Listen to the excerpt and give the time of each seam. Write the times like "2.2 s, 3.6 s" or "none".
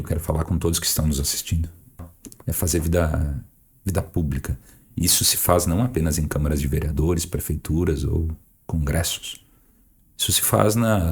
2.1 s